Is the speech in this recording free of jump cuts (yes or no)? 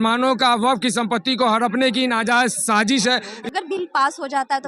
no